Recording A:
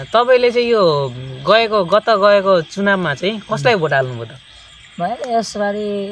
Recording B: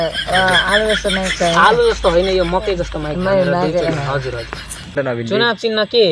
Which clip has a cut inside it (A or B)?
B